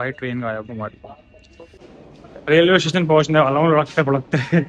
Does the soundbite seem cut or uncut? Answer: cut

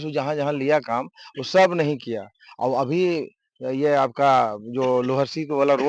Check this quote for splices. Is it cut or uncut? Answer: uncut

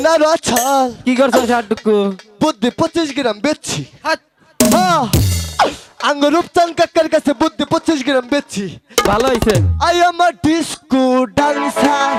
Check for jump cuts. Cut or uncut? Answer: uncut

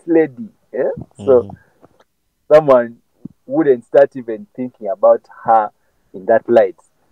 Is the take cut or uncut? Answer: uncut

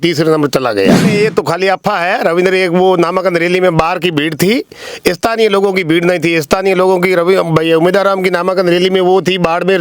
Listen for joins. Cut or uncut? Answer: cut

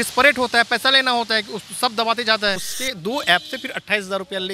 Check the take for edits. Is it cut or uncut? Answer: cut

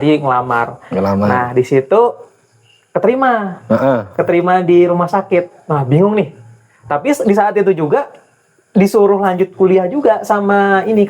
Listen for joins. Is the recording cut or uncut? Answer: uncut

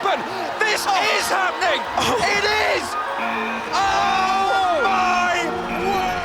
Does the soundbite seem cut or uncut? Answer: uncut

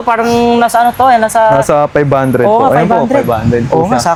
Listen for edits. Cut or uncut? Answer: uncut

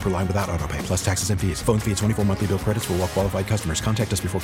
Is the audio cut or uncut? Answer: uncut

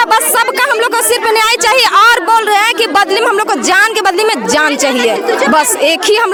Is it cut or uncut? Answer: uncut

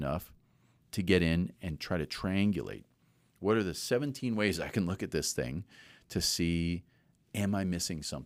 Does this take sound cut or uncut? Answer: uncut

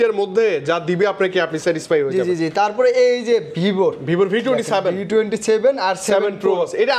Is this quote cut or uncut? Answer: uncut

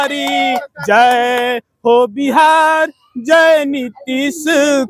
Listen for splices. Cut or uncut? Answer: uncut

